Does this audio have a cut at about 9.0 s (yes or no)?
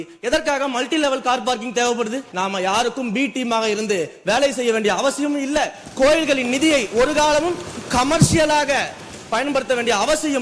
no